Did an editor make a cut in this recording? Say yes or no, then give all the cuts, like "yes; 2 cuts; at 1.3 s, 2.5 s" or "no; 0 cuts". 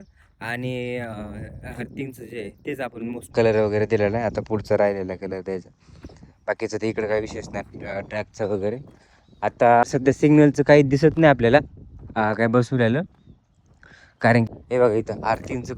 yes; 3 cuts; at 3.3 s, 9.8 s, 14.5 s